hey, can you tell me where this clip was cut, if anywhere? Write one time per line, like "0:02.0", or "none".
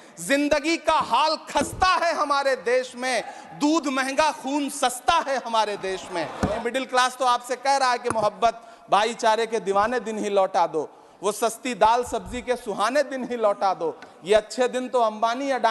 0:06.5